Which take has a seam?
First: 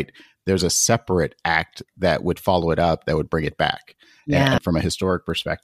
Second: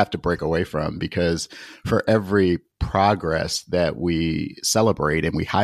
first; 1 cut; at 4.6 s

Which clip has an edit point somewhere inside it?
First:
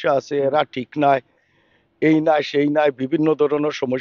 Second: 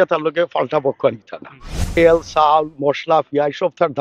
second; 1 cut; at 2.0 s

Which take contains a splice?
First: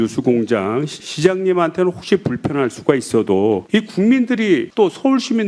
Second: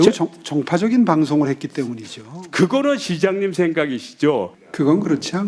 first; 1 cut; at 0.9 s

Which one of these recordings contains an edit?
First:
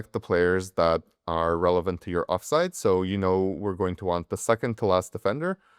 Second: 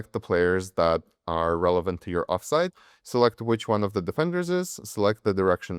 second; 1 cut; at 2.7 s

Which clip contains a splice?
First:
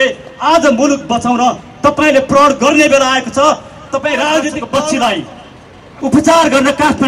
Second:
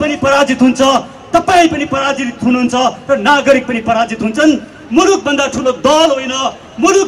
first; 1 cut; at 4.6 s

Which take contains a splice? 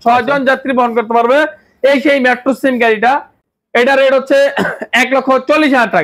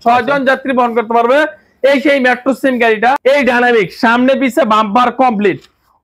second; 1 cut; at 3.2 s

